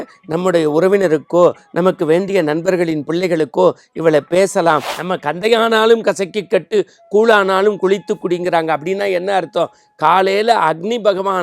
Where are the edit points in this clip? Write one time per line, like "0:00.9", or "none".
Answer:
0:04.9